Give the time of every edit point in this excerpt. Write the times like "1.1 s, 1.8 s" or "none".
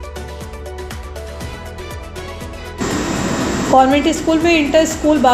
none